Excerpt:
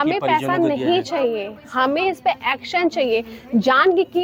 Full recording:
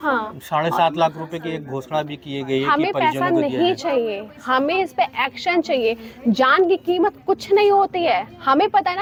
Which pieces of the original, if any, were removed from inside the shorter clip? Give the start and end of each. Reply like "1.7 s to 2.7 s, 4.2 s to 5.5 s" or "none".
none

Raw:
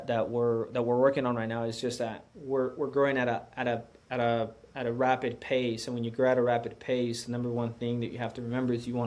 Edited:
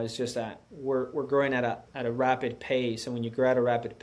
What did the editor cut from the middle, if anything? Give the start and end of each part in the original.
3.5 s to 4.7 s

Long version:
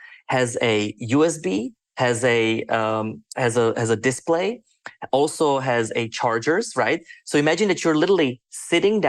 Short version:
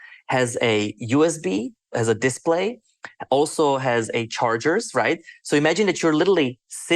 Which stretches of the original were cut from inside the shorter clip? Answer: 1.9 s to 3.8 s

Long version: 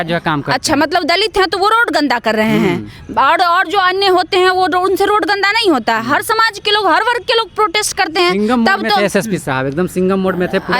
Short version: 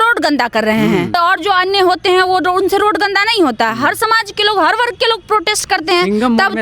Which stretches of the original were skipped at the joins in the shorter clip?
2.9 s to 3.4 s

